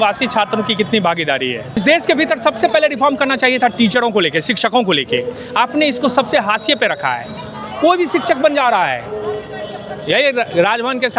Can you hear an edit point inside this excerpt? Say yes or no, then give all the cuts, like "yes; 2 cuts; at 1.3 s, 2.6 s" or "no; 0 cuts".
yes; 1 cut; at 1.8 s